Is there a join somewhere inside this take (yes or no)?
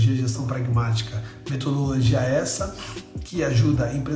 no